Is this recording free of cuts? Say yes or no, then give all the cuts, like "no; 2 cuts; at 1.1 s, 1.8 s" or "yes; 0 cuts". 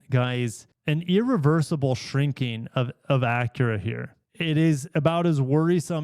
no; 1 cut; at 4.2 s